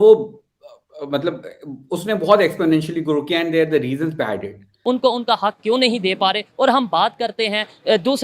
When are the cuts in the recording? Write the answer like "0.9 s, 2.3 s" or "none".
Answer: 4.7 s